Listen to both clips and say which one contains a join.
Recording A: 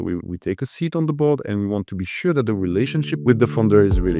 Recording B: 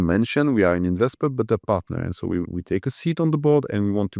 A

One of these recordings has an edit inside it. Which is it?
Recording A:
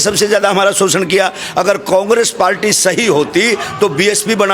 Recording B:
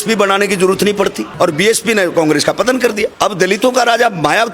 B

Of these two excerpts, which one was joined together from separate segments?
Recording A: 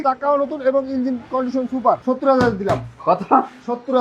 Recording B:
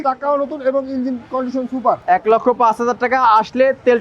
A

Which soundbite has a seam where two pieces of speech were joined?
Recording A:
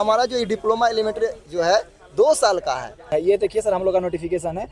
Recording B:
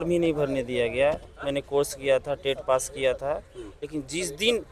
A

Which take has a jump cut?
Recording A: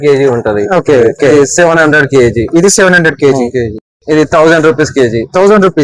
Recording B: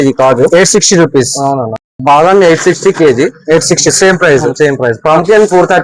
A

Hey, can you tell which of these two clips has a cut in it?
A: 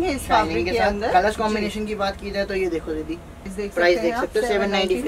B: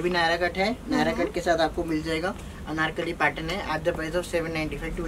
A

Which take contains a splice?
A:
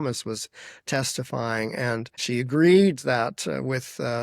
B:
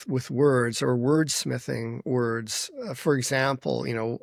A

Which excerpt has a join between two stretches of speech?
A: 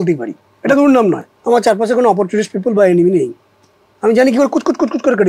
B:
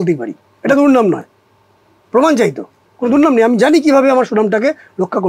A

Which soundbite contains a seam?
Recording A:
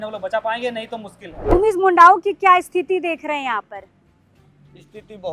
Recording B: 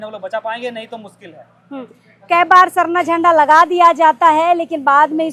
A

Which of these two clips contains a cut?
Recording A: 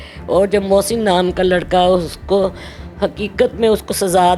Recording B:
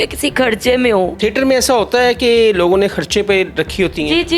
B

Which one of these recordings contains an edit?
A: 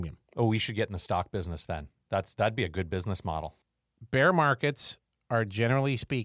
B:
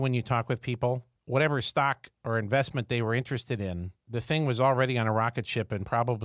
B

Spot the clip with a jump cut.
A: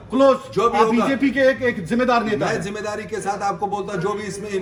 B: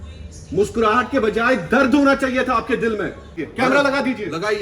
B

